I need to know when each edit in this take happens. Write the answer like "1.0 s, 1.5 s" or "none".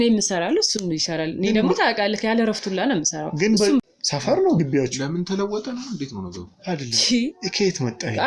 3.8 s